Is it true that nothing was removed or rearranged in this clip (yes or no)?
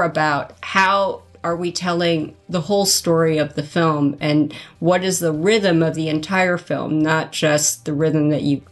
yes